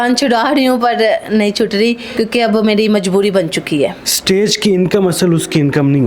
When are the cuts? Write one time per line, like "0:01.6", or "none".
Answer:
0:04.0